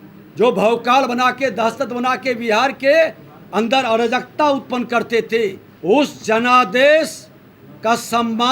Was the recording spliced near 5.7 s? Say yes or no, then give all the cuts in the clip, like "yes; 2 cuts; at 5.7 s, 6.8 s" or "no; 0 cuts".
yes; 1 cut; at 5.7 s